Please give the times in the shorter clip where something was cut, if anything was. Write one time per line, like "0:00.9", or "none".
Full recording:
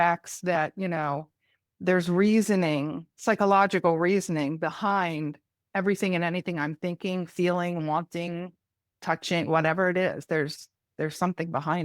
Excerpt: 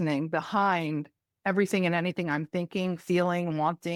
none